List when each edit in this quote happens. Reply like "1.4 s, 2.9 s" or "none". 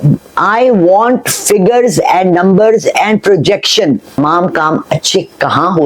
4.2 s